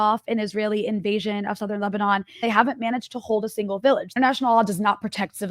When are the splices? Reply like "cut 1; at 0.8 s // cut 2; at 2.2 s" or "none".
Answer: cut 1; at 2.4 s // cut 2; at 4.1 s